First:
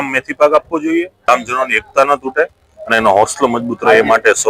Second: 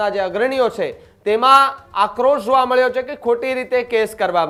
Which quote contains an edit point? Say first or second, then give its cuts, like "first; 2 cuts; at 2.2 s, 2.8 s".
first; 1 cut; at 1.3 s